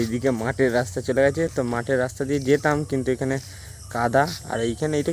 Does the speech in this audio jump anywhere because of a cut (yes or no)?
no